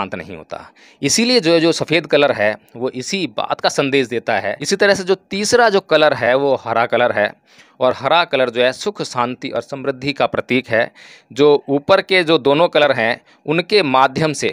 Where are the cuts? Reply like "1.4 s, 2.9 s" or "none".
4.6 s